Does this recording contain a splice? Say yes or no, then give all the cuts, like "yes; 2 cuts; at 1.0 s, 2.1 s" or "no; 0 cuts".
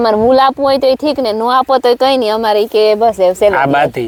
no; 0 cuts